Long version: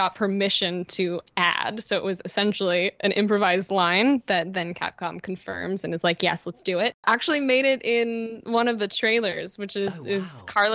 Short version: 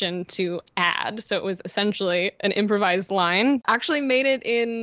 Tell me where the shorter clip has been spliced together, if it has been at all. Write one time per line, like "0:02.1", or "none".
0:03.6

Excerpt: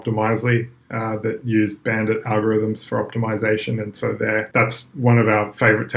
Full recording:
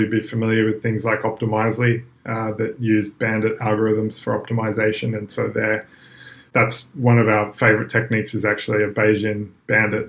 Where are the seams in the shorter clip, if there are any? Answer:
0:04.5

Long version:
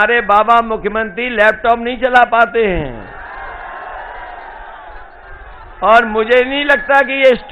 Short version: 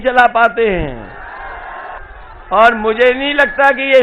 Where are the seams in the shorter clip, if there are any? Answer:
0:02.0

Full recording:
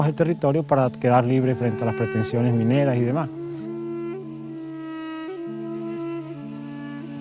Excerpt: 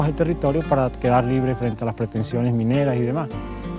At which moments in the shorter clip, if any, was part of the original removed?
none

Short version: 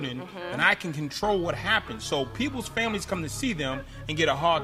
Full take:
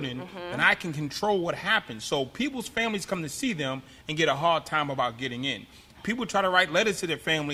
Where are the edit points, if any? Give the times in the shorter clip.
none

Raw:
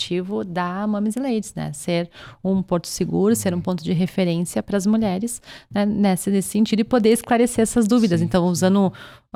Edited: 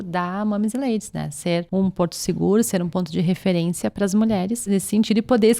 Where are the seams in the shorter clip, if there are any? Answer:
0:01.7
0:04.6

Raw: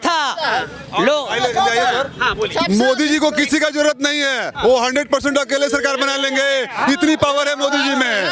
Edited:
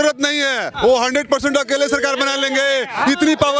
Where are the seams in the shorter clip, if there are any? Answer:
none

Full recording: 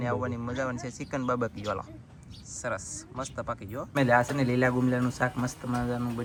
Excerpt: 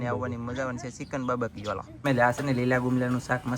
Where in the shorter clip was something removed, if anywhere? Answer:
0:01.9

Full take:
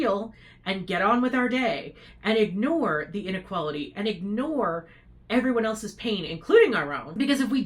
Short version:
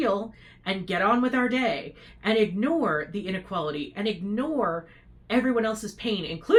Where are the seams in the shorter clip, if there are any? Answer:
none

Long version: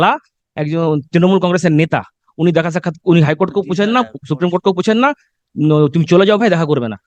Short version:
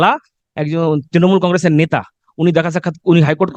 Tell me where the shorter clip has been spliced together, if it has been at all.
none

